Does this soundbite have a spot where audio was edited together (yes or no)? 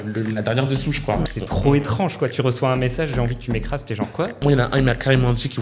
yes